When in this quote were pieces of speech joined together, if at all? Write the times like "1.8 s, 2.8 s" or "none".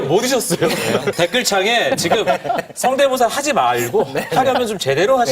1.1 s